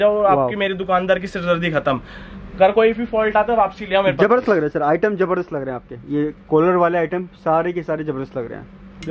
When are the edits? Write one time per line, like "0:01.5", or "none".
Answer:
none